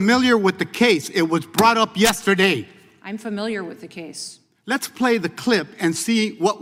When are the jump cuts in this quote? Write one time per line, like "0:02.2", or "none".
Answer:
none

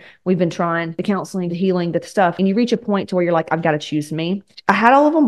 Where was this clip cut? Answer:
0:01.2
0:02.3
0:04.4

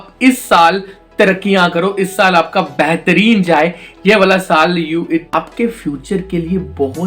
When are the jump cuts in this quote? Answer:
0:05.3

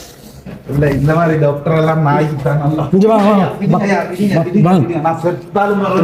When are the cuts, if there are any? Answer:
none

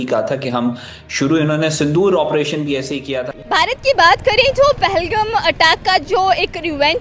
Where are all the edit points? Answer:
0:03.0

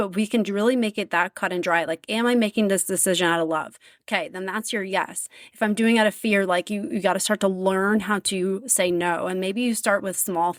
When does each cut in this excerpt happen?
none

